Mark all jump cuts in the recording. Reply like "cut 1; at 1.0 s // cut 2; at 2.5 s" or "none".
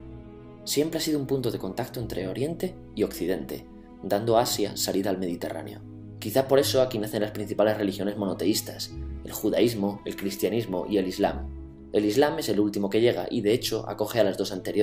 cut 1; at 11.1 s

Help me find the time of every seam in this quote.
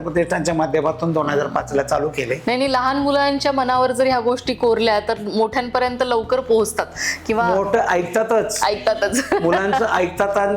none

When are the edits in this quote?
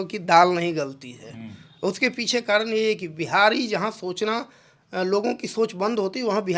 none

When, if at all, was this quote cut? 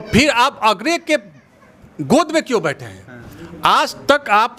none

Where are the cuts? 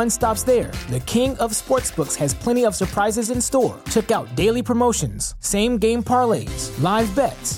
none

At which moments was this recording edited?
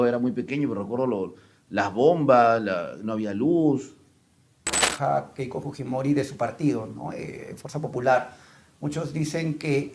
cut 1; at 4.8 s

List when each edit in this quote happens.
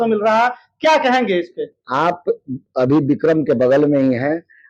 none

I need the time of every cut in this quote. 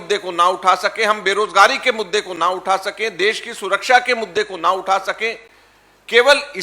none

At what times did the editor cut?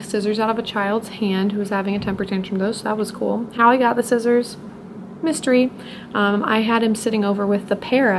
none

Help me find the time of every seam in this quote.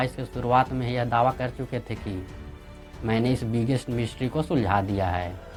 none

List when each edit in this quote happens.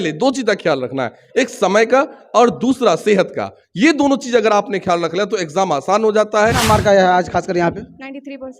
cut 1; at 6.6 s

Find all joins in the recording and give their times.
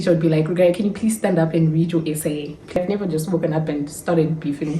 cut 1; at 2.8 s

